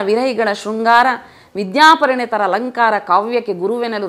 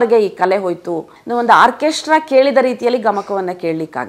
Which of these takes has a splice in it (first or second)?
second